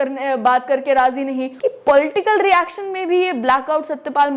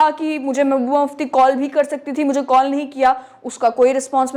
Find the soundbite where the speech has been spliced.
first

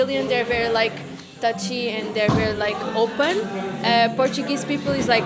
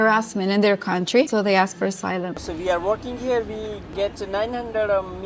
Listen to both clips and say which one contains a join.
second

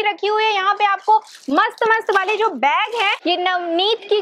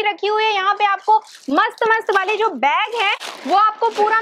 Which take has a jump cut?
first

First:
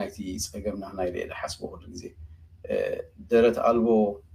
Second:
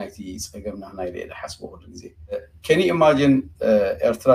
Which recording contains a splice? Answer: second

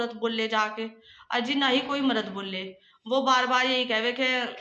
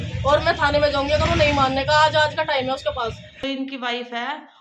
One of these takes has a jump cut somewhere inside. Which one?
second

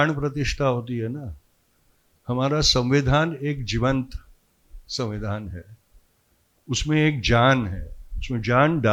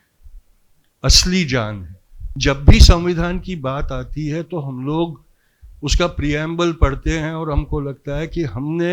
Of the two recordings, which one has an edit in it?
second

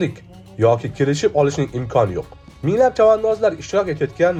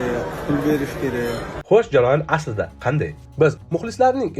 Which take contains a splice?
second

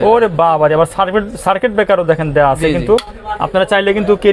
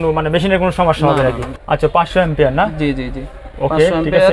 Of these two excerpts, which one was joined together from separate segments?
second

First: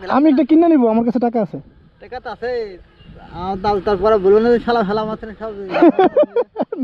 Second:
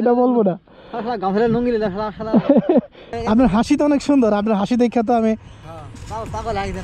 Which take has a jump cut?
second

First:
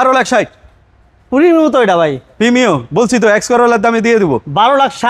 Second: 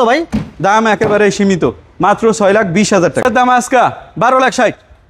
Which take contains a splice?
second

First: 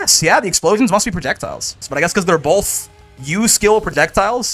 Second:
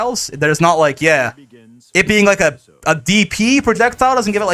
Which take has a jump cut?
first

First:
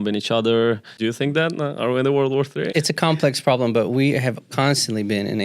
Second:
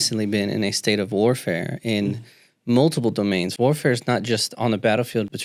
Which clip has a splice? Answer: first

